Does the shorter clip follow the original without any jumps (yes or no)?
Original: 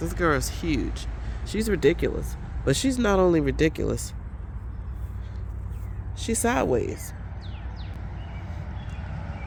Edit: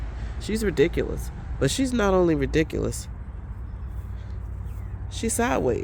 yes